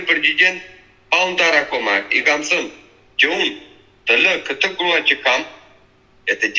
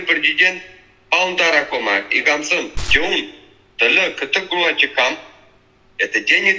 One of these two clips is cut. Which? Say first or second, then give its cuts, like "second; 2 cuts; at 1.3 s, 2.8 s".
second; 1 cut; at 2.8 s